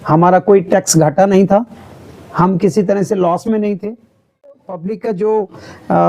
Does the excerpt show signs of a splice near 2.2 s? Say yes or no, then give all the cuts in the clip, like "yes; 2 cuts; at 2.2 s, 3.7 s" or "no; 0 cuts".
no; 1 cut; at 4.5 s